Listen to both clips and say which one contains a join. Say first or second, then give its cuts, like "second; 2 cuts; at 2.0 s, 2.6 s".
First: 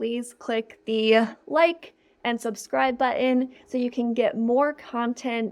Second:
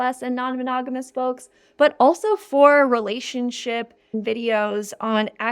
second; 1 cut; at 4.1 s